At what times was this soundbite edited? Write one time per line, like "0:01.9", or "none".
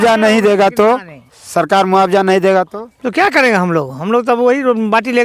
none